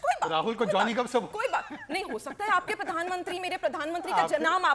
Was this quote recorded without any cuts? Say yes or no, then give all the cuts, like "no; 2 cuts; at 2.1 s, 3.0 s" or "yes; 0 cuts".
no; 1 cut; at 2.2 s